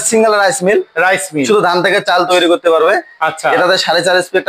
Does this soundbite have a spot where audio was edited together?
no; 0 cuts

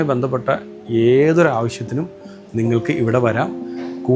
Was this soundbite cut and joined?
no; 0 cuts

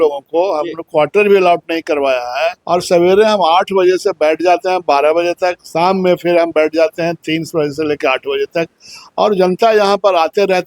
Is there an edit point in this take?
yes; 1 cut; at 2.6 s

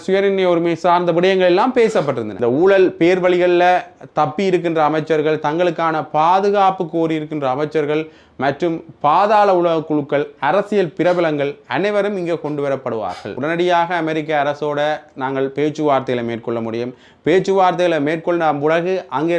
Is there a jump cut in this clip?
yes; 2 cuts; at 2.3 s, 13.3 s

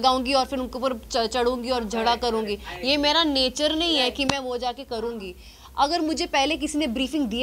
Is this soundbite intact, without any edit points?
yes; 0 cuts

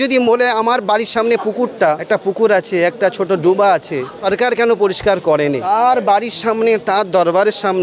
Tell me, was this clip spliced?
yes; 3 cuts; at 2.0 s, 4.1 s, 5.6 s

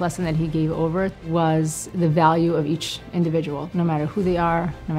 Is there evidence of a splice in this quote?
yes; 3 cuts; at 1.2 s, 1.8 s, 3.6 s

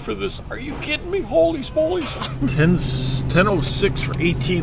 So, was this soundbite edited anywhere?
yes; 1 cut; at 2.5 s

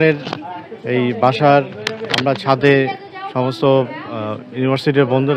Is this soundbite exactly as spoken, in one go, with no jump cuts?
yes; 0 cuts

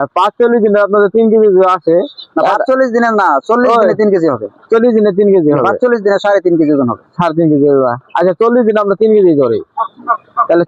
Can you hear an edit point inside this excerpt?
no; 0 cuts

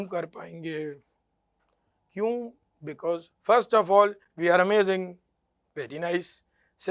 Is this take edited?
no; 0 cuts

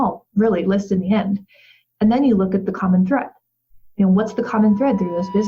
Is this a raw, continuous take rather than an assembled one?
yes; 0 cuts

